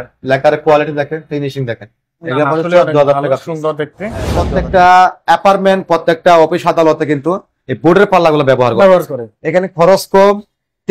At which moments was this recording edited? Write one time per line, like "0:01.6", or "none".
0:04.3